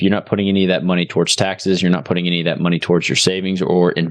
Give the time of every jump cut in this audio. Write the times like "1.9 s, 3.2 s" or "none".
none